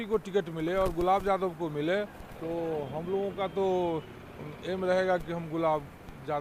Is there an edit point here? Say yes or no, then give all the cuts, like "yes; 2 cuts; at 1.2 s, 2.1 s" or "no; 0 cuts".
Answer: no; 0 cuts